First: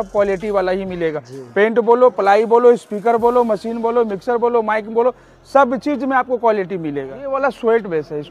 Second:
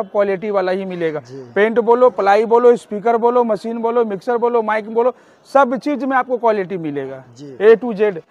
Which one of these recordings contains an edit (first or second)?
first